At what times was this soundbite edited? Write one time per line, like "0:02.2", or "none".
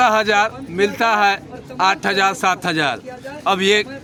none